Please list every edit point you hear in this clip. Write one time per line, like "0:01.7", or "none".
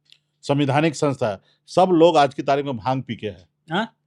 none